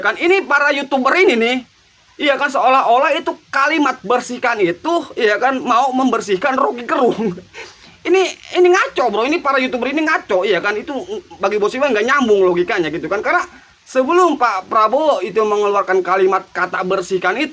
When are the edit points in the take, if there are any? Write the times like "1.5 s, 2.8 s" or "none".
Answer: none